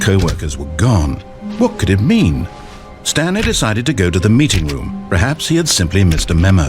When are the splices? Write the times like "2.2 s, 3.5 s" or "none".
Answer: 2.4 s